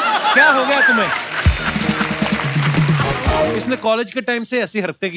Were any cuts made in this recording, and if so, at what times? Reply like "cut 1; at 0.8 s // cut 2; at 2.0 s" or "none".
cut 1; at 3.6 s